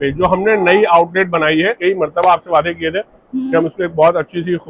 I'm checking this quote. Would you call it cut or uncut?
uncut